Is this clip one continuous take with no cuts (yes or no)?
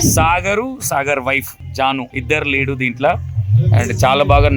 no